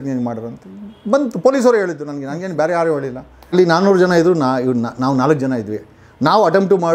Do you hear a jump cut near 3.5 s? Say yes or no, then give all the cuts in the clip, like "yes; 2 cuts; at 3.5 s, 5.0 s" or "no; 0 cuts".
yes; 1 cut; at 3.5 s